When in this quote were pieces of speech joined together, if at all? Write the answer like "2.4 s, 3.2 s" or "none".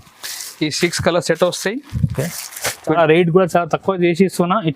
3.0 s